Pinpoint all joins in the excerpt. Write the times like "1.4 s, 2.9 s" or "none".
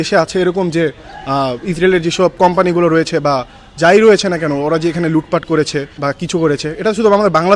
5.9 s